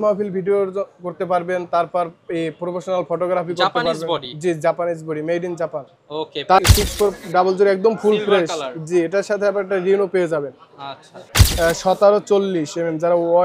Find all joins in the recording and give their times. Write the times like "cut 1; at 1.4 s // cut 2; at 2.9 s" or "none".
cut 1; at 6.6 s // cut 2; at 11.4 s